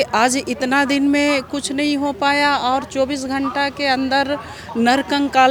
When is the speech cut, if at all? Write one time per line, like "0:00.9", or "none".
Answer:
none